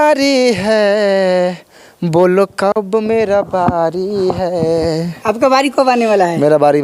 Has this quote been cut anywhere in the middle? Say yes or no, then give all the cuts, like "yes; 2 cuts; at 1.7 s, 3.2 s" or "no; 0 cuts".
no; 0 cuts